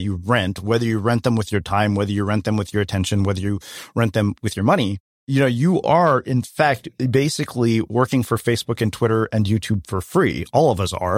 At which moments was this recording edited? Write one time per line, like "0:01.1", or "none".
0:05.2
0:06.9